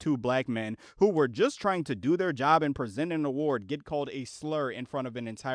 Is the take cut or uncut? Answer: uncut